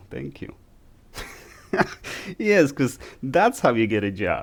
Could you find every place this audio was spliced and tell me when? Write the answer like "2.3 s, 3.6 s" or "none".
none